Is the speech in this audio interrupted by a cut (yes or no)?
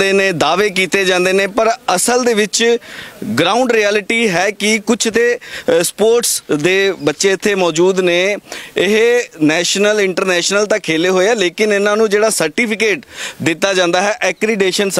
no